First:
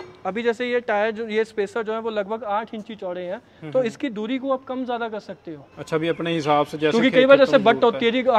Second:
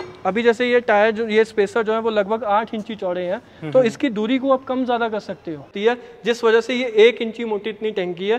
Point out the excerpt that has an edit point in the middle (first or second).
second